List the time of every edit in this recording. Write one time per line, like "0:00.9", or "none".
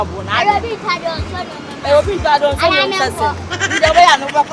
none